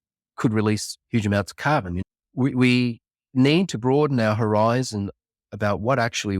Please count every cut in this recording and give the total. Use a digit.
1